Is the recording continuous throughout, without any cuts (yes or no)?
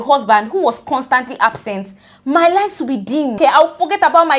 no